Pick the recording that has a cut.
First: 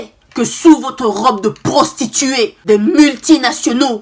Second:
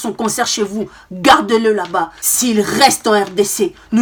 first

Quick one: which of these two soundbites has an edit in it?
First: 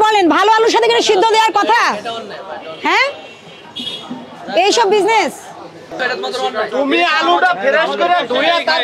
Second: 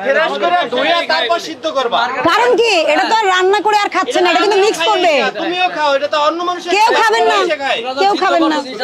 first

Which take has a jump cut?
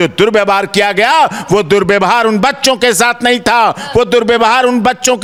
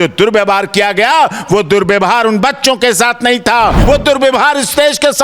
second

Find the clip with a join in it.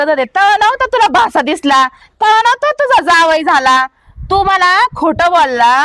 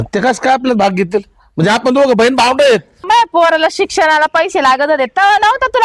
second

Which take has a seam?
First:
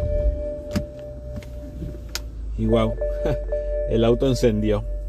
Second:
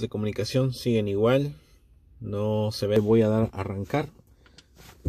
second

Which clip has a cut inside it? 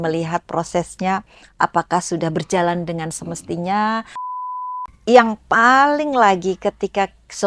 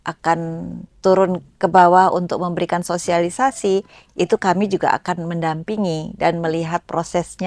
first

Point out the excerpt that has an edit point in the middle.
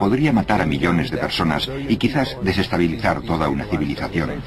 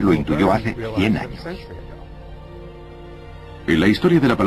first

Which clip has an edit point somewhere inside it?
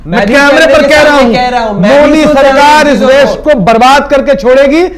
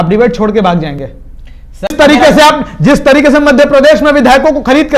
second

